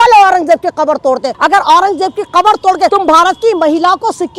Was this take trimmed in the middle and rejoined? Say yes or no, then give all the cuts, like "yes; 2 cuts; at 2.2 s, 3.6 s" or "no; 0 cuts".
yes; 2 cuts; at 1.3 s, 2.9 s